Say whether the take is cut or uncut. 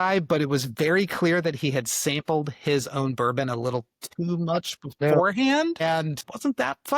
uncut